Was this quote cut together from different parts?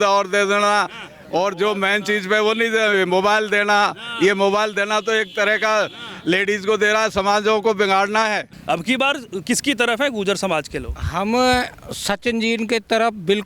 yes; 1 cut; at 8.5 s

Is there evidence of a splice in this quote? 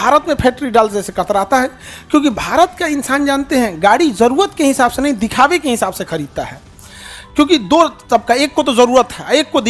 no; 0 cuts

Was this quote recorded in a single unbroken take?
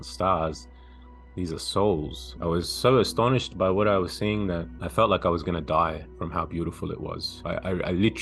no; 3 cuts; at 2.2 s, 4.8 s, 7.3 s

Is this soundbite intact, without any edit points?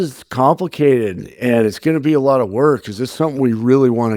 yes; 0 cuts

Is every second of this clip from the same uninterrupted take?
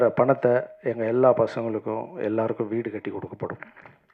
yes; 0 cuts

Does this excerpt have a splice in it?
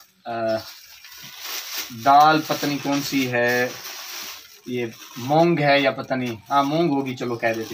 no; 0 cuts

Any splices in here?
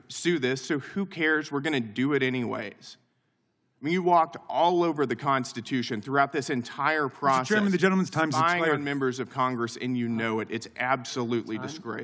no; 0 cuts

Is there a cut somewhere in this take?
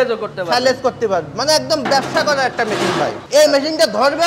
yes; 1 cut; at 3.2 s

